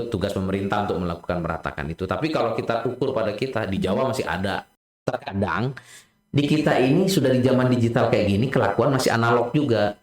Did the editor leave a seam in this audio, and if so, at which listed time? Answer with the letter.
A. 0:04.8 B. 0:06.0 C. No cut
A